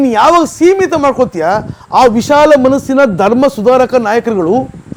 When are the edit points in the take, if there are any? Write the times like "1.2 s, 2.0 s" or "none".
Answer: none